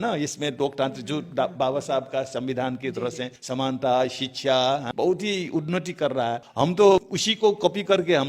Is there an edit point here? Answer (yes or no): yes